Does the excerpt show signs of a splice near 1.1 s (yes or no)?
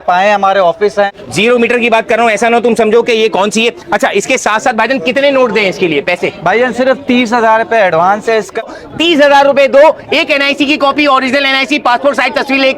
yes